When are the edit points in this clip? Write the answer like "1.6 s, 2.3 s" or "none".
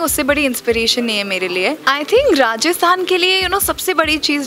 1.8 s